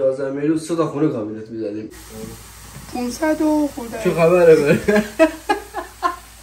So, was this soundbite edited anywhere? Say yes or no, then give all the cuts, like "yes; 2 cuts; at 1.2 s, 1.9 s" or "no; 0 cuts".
yes; 1 cut; at 2.0 s